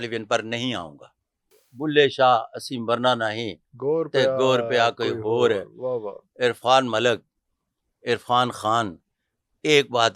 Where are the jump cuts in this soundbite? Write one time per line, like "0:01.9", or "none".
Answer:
0:01.5